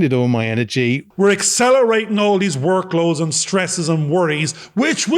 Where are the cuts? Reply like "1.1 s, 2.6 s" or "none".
1.1 s